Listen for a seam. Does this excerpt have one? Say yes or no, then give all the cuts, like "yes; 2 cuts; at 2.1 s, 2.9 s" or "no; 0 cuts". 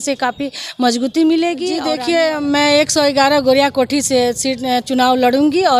yes; 1 cut; at 1.9 s